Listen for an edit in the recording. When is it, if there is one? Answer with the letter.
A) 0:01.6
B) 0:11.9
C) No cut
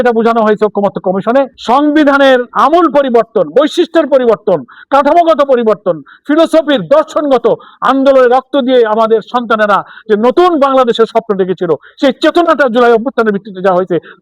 A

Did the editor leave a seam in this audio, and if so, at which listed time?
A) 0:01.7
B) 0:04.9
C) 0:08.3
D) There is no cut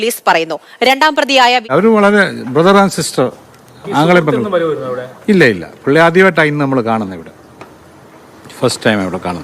A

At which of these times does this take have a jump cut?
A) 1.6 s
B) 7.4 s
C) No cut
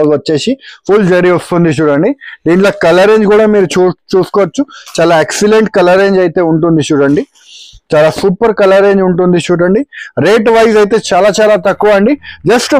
C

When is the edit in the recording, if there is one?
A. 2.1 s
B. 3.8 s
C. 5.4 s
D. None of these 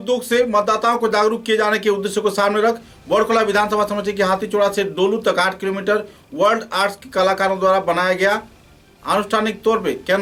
D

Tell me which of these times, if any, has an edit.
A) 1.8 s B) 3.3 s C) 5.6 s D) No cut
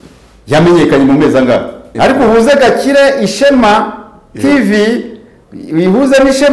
A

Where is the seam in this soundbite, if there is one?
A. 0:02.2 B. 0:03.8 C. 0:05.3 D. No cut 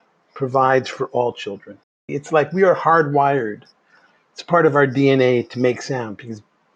A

